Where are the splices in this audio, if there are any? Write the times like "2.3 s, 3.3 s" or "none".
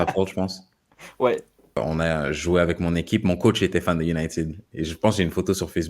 1.8 s